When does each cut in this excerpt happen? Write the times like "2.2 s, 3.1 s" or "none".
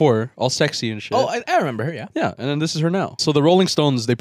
3.1 s